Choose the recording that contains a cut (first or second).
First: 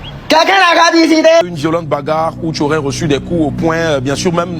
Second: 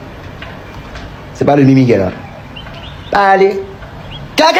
first